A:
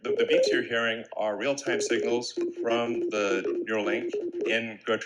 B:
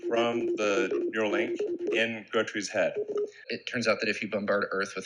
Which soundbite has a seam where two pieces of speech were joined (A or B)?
B